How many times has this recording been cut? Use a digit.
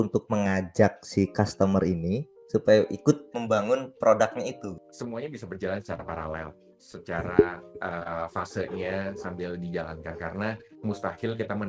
3